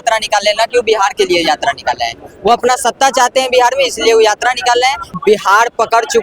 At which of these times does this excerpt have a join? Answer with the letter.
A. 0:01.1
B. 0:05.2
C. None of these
B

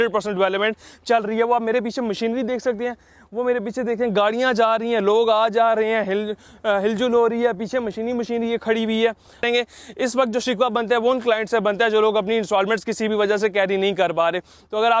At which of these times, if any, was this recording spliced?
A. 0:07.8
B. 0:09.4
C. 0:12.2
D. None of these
B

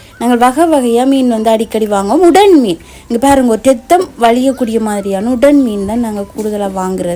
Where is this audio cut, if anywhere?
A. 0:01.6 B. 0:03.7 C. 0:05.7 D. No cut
D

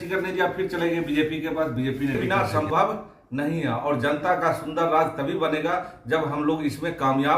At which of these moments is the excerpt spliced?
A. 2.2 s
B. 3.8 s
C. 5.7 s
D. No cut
A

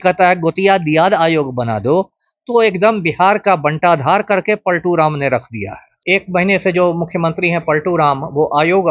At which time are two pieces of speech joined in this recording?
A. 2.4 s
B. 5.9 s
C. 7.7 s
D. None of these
B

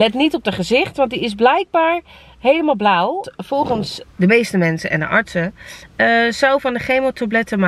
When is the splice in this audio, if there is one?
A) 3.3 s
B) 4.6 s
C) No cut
A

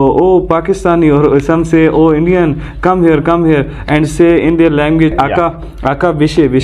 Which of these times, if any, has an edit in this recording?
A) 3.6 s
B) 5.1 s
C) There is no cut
B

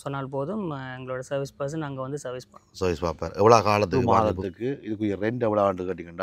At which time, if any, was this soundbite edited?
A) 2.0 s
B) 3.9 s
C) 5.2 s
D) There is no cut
B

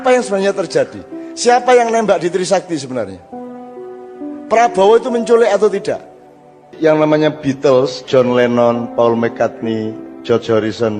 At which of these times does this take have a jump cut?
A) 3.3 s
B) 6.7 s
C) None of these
B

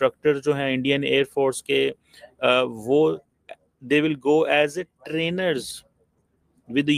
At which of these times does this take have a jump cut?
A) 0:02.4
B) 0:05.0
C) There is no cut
C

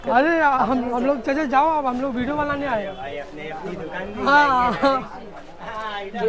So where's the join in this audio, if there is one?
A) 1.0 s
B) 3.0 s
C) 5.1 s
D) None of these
D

